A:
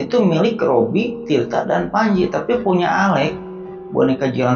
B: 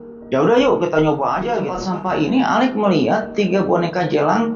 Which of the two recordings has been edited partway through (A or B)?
B